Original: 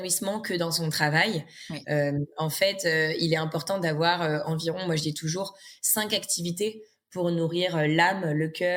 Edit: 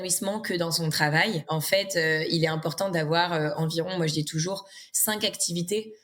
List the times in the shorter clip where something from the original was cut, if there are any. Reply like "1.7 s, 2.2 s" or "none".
1.4 s